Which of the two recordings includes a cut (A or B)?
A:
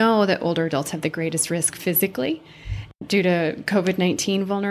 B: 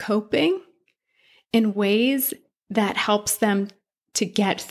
A